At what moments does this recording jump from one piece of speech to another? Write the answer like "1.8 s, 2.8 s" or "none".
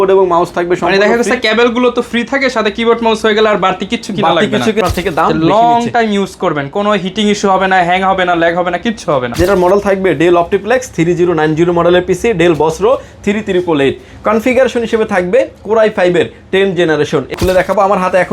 4.8 s, 9.3 s, 17.3 s